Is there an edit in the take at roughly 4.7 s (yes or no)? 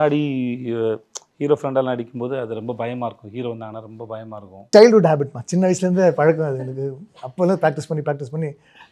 yes